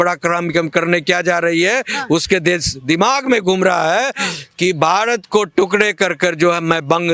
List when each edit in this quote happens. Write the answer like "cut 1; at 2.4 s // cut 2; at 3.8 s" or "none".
none